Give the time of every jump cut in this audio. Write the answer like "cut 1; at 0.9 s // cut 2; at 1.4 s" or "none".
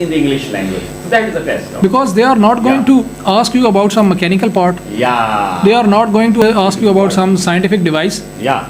cut 1; at 6.4 s